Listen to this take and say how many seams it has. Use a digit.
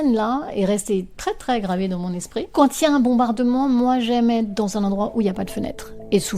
1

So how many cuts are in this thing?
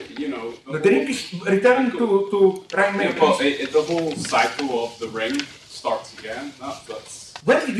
1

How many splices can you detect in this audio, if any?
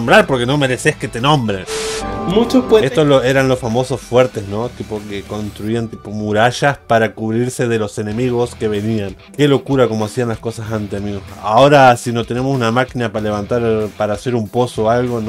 1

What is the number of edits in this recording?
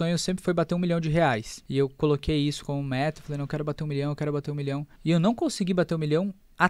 2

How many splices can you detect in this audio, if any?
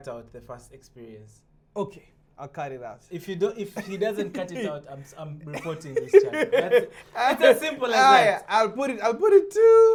0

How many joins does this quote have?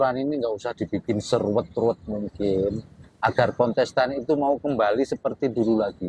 0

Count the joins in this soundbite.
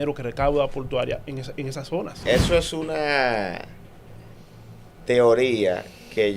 1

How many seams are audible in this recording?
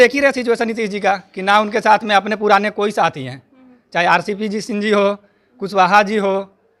0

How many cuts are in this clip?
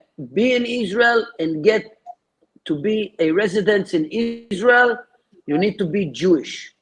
1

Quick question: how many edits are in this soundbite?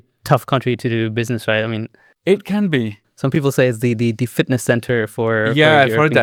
0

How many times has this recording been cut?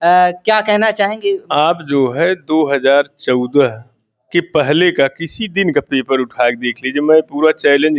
1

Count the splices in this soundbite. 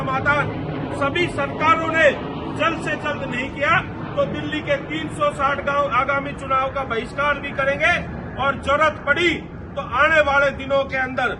0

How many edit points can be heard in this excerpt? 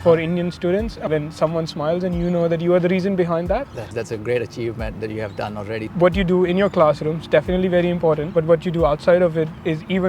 4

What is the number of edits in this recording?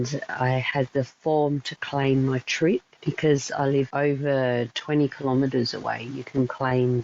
2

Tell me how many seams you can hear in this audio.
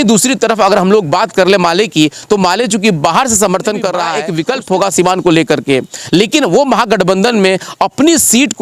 1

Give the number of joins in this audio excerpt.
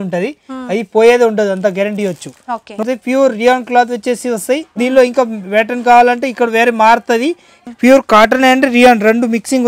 2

